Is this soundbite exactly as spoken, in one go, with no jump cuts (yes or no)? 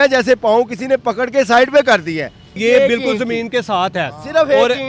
yes